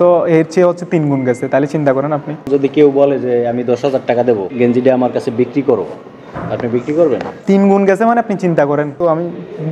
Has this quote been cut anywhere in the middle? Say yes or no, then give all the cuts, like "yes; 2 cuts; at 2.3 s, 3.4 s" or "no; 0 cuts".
yes; 4 cuts; at 2.5 s, 4.5 s, 7.3 s, 8.9 s